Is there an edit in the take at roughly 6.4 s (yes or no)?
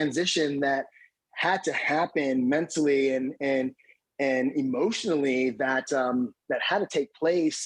yes